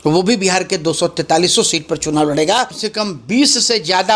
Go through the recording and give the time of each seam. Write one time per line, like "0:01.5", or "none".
0:02.8